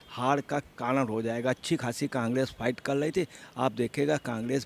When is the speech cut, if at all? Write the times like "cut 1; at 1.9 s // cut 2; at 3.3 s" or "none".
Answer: none

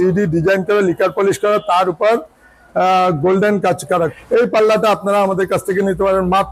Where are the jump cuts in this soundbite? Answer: cut 1; at 4.2 s

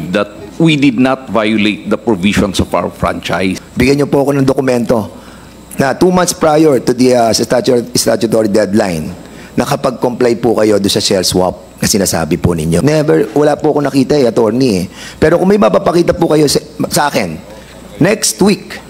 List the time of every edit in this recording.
cut 1; at 3.6 s // cut 2; at 12.8 s

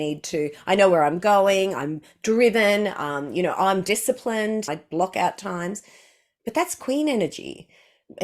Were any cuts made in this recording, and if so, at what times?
cut 1; at 4.8 s

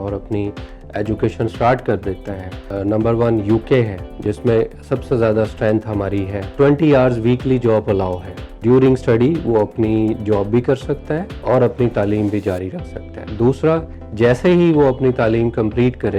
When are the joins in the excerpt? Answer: cut 1; at 2.6 s // cut 2; at 4.0 s // cut 3; at 6.5 s // cut 4; at 8.6 s // cut 5; at 11.3 s // cut 6; at 14.0 s

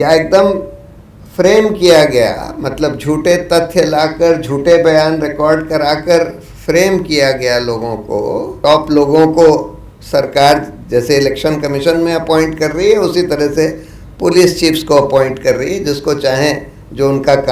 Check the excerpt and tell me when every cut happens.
cut 1; at 8.5 s

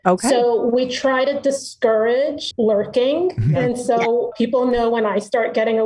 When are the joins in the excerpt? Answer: cut 1; at 2.4 s // cut 2; at 4.3 s

